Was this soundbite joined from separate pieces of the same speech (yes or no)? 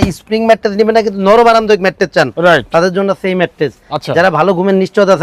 no